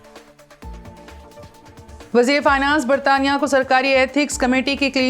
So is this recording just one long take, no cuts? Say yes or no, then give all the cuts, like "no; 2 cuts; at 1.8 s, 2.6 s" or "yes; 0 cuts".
no; 1 cut; at 2.1 s